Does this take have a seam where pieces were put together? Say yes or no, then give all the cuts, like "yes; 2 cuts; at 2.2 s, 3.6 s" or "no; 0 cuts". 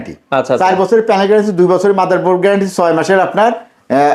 no; 0 cuts